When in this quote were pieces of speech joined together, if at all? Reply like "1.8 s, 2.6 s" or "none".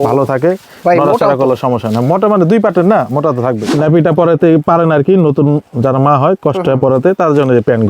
3.7 s

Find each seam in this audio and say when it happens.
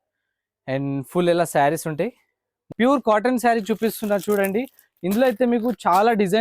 2.7 s

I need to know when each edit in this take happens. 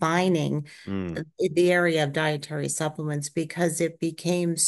none

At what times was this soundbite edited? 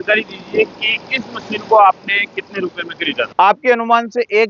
3.2 s

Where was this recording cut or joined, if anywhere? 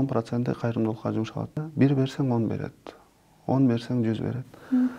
1.6 s

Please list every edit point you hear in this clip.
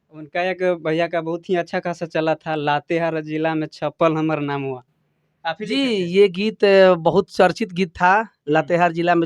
none

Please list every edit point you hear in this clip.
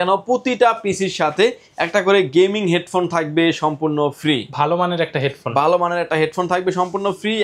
none

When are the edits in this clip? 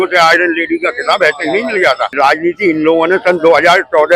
2.1 s

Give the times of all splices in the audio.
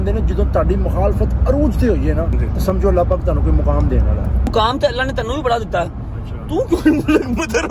2.4 s, 4.5 s

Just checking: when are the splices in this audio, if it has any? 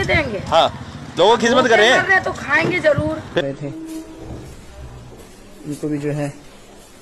3.4 s

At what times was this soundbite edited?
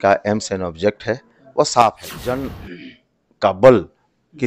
2.1 s

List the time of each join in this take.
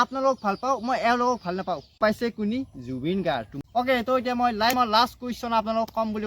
1.9 s, 3.6 s, 4.7 s

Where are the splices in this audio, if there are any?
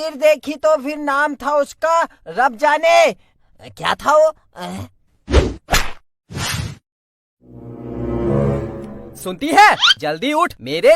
6.9 s

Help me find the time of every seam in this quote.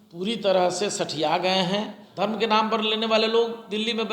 2.0 s

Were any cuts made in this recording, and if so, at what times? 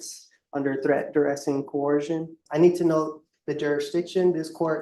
2.4 s

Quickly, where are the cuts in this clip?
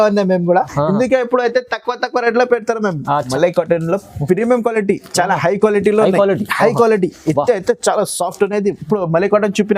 3.3 s

